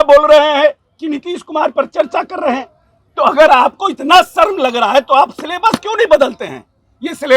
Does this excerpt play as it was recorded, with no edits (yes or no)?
yes